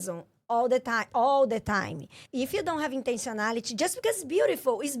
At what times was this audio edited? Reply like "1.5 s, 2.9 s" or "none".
2.2 s